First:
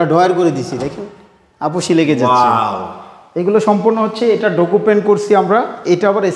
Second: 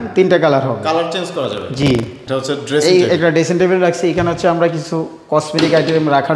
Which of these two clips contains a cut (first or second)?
second